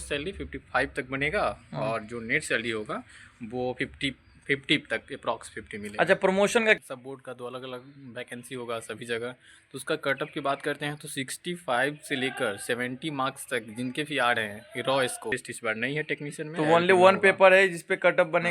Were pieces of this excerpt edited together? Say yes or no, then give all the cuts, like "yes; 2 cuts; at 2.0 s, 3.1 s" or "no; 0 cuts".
yes; 2 cuts; at 6.8 s, 15.3 s